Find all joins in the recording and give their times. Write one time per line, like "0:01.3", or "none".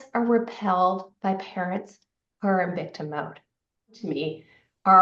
0:04.0